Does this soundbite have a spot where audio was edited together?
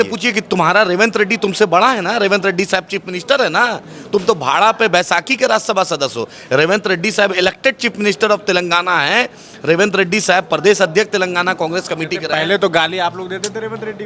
no; 0 cuts

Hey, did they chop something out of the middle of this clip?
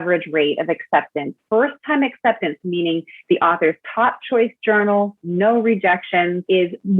no; 0 cuts

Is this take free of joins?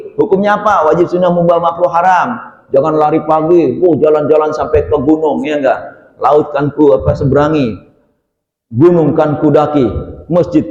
yes; 0 cuts

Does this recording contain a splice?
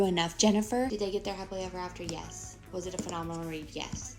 no; 0 cuts

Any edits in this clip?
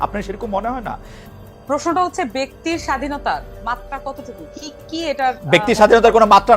yes; 1 cut; at 1.1 s

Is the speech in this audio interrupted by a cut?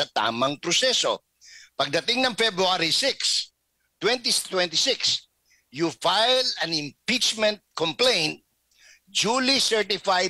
no; 0 cuts

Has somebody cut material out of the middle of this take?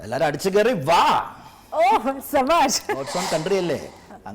yes; 1 cut; at 3.0 s

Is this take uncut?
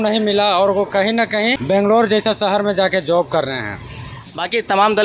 no; 2 cuts; at 1.6 s, 4.1 s

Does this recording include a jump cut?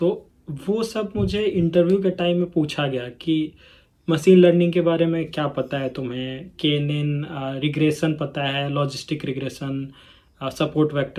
no; 0 cuts

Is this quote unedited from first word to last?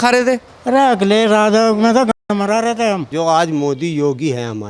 no; 1 cut; at 3.1 s

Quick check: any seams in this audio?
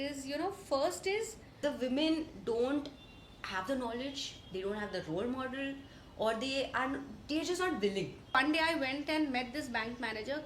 yes; 2 cuts; at 1.5 s, 8.4 s

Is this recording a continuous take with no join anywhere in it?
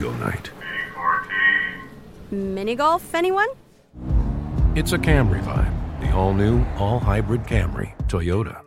yes; 0 cuts

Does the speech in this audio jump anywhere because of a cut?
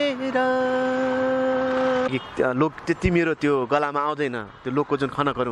yes; 1 cut; at 2.1 s

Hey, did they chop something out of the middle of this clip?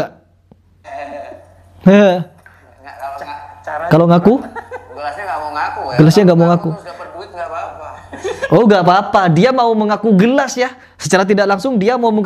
no; 0 cuts

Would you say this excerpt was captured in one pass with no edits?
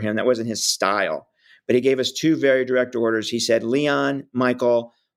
yes; 0 cuts

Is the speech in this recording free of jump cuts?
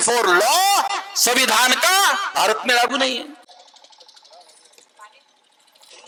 yes; 0 cuts

